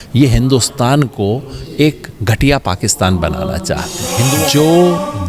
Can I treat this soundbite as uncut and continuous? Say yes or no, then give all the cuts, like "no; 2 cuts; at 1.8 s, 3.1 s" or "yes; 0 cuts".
no; 1 cut; at 4.2 s